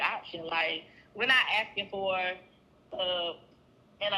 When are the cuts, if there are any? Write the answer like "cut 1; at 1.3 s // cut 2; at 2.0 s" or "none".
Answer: none

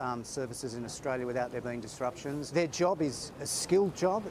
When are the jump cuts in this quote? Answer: cut 1; at 2.5 s

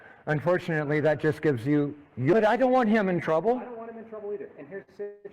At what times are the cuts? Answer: cut 1; at 2.3 s

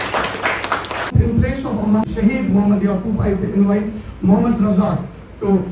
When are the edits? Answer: cut 1; at 1.1 s // cut 2; at 2.0 s

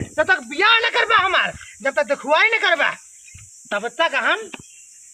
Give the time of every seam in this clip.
none

